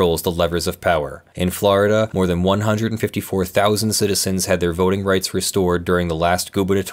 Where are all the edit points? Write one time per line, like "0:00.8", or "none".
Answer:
0:01.2
0:02.1